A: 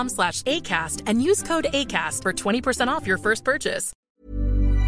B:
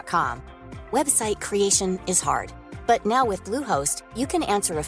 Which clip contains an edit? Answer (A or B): A